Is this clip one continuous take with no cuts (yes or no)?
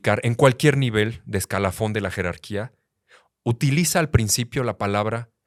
yes